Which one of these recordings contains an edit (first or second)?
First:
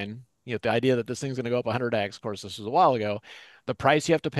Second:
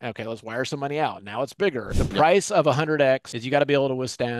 second